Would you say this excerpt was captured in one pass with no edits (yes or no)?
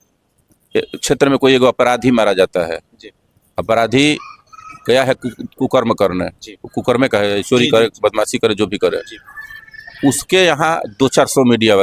yes